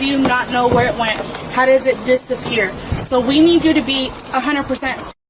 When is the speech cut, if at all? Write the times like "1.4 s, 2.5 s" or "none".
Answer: none

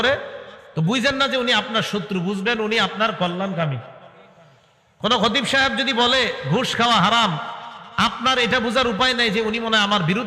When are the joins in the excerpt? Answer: none

